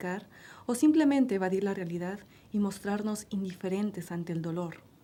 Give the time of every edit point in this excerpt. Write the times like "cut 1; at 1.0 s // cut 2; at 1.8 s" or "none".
none